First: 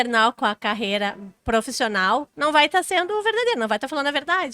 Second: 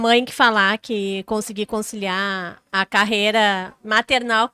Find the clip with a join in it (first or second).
first